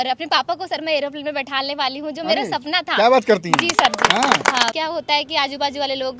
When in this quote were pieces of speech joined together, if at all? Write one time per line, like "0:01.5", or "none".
0:04.7